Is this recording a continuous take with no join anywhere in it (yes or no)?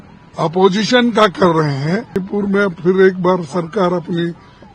no